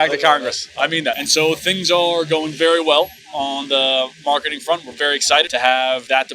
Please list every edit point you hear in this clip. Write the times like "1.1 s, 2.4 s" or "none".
none